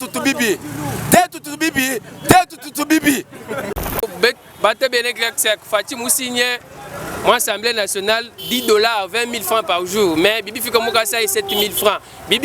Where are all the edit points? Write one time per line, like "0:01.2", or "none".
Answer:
0:03.7